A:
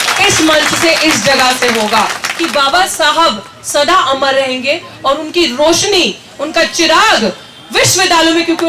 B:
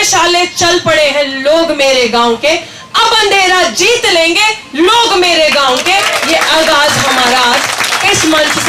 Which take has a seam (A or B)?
A